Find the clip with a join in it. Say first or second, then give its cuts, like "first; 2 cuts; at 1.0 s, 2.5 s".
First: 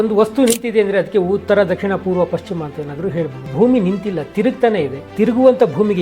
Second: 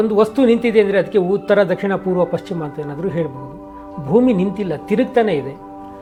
first; 2 cuts; at 3.4 s, 5.0 s